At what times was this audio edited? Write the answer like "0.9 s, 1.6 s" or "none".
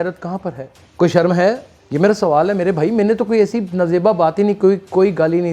none